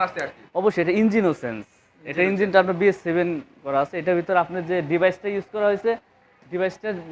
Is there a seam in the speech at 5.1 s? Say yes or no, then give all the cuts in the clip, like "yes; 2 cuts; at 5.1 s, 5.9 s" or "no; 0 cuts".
no; 0 cuts